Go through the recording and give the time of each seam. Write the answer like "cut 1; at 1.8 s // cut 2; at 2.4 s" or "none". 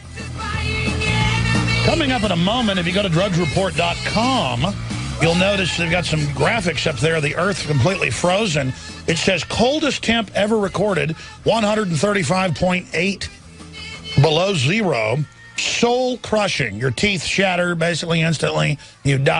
cut 1; at 5.8 s